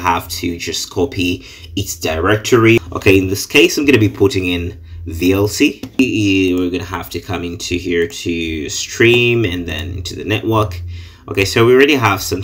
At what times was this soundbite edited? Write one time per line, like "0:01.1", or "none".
0:02.8
0:06.0